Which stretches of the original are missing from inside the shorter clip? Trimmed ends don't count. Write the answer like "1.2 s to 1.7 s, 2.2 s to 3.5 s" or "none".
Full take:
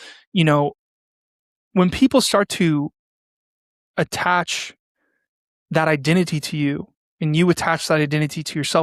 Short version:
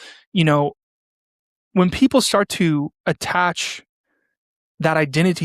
3.0 s to 3.9 s